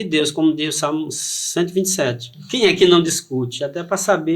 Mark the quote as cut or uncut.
cut